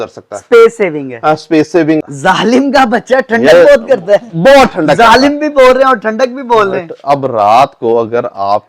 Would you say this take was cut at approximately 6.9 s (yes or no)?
no